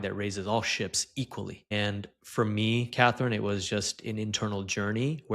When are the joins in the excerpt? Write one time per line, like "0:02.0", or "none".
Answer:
0:01.7